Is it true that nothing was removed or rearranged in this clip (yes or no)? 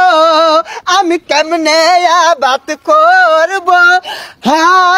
yes